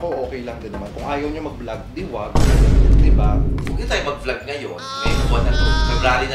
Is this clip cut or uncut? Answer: cut